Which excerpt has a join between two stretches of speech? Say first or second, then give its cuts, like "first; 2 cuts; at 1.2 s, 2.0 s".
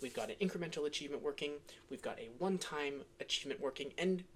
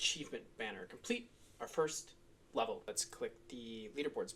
second; 1 cut; at 3.0 s